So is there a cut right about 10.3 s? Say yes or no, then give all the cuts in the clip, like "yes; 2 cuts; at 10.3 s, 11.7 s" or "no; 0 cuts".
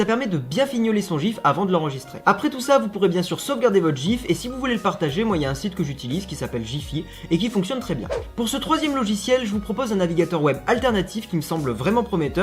yes; 1 cut; at 10.3 s